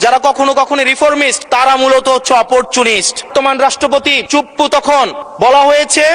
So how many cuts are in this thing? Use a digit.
4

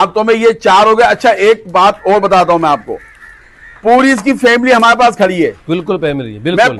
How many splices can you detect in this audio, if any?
0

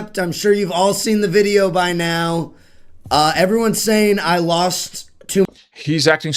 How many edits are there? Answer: 0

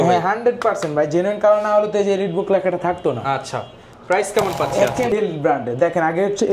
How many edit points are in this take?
1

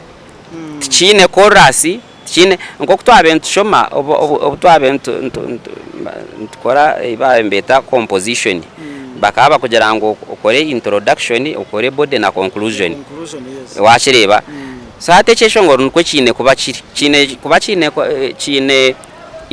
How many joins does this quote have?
0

